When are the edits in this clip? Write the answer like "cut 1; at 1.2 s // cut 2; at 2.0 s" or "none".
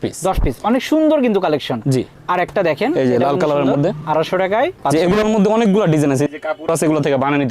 none